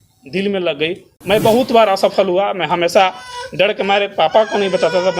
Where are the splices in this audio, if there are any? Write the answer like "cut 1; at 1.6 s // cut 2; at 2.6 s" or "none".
cut 1; at 1.1 s